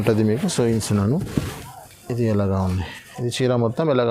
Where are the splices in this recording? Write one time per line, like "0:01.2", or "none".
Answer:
none